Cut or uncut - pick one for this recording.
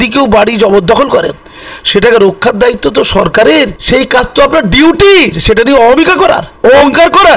cut